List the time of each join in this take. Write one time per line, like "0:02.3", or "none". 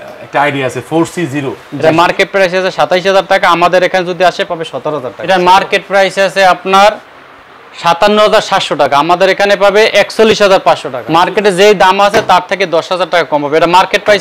0:01.6
0:05.1
0:10.9